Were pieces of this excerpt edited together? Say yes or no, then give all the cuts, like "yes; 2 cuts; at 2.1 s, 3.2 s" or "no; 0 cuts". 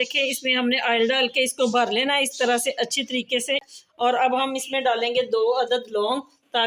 yes; 1 cut; at 3.7 s